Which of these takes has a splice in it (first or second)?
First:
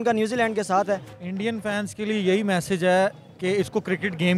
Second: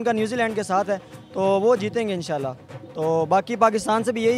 first